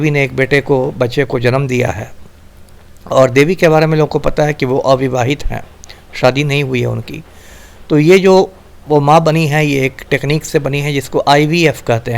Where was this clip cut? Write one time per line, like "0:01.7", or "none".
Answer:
0:06.3